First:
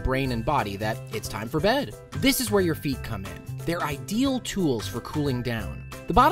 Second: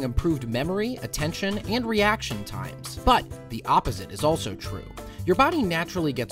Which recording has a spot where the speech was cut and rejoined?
first; 1 cut; at 5.3 s

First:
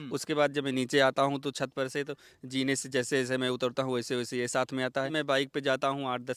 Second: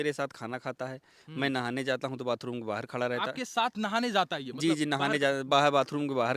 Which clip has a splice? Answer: first; 1 cut; at 5.1 s

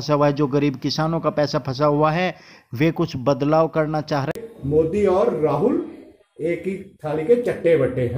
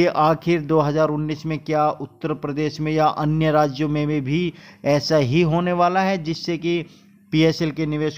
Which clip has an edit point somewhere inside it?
first; 1 cut; at 4.3 s

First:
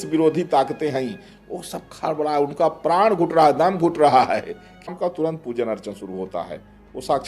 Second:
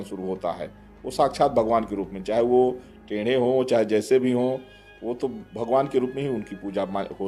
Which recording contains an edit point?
first; 1 cut; at 4.9 s

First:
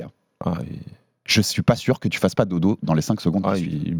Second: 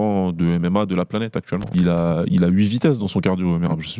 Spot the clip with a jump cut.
second; 1 cut; at 1.7 s

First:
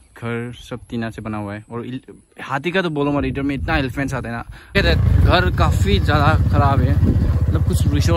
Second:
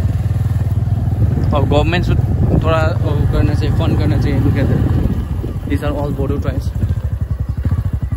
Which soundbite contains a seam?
first; 1 cut; at 4.7 s

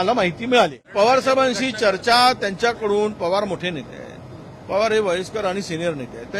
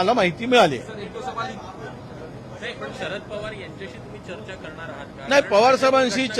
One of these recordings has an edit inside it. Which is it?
first; 1 cut; at 0.9 s

